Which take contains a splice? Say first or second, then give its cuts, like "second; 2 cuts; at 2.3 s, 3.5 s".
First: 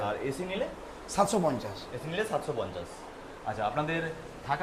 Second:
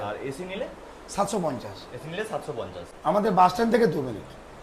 second; 1 cut; at 2.8 s